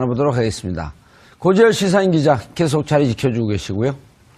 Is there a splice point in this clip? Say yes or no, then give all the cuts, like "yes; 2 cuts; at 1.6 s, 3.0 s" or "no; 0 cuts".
no; 0 cuts